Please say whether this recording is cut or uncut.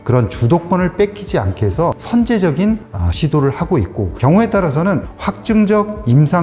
cut